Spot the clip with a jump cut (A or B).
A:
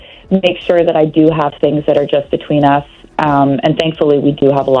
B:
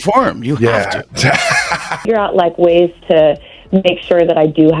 B